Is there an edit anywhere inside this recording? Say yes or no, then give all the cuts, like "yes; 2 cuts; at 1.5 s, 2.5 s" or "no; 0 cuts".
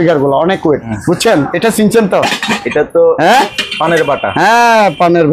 yes; 1 cut; at 0.9 s